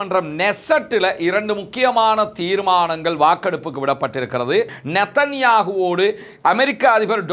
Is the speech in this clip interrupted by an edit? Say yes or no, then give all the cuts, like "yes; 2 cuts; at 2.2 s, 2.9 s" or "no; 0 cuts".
yes; 1 cut; at 4.8 s